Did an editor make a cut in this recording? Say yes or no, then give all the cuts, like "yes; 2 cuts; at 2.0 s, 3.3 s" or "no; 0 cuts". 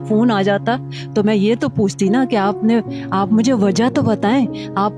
no; 0 cuts